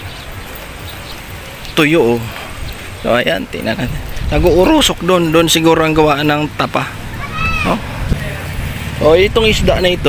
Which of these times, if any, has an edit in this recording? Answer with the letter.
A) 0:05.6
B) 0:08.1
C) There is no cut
B